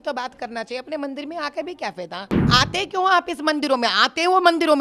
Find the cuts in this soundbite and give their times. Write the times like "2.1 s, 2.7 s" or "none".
2.5 s